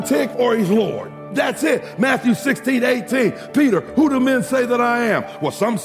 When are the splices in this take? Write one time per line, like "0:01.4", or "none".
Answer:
0:01.3